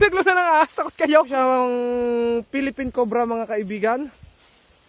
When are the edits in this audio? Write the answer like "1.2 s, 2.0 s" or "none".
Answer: 1.3 s